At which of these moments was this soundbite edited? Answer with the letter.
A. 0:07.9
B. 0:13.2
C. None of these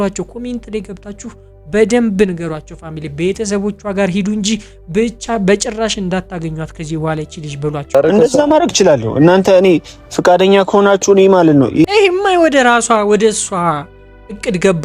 A